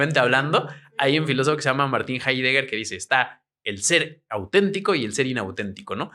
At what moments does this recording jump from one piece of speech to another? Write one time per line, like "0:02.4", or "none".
none